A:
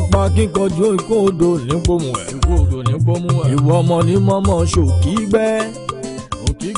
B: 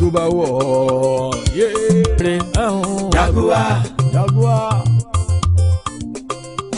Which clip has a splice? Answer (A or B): B